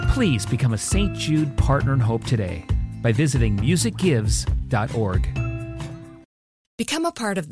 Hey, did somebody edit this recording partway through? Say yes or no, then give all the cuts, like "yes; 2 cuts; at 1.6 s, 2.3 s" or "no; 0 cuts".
yes; 1 cut; at 6.2 s